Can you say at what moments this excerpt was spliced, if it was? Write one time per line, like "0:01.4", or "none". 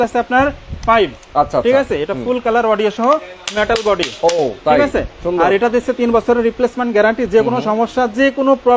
none